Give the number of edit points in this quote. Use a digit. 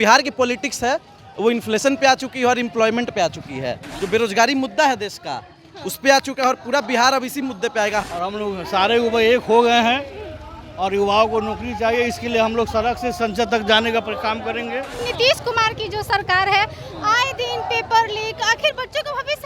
3